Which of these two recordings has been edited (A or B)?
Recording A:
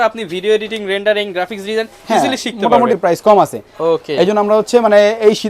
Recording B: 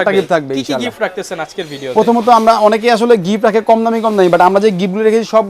A